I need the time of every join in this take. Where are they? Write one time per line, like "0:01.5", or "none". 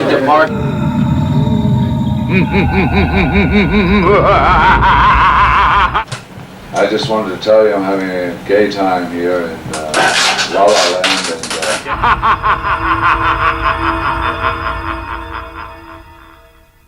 0:15.0